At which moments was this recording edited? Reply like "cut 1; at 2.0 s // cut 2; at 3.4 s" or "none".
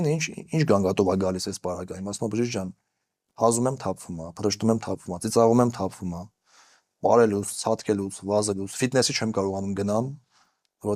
none